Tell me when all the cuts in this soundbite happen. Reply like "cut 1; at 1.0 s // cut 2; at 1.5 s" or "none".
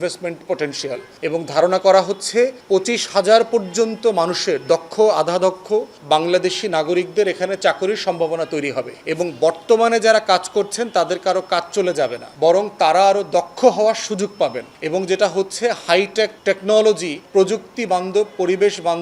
cut 1; at 1.1 s // cut 2; at 2.6 s // cut 3; at 5.9 s // cut 4; at 9.0 s // cut 5; at 12.2 s // cut 6; at 14.7 s // cut 7; at 16.4 s // cut 8; at 17.1 s